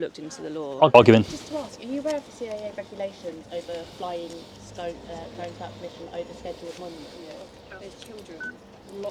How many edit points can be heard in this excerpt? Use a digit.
2